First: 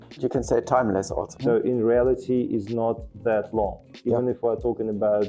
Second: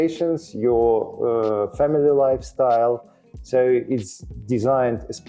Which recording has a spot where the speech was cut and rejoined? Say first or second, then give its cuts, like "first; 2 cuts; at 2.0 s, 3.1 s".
first; 1 cut; at 1.4 s